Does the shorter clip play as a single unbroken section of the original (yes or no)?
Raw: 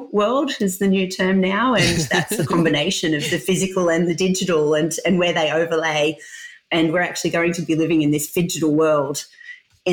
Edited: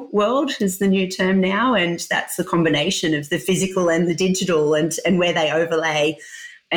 yes